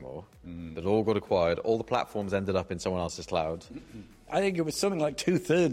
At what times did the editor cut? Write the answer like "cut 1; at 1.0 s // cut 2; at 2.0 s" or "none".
cut 1; at 4.0 s